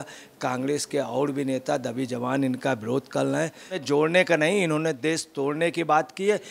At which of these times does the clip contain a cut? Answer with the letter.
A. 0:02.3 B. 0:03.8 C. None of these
B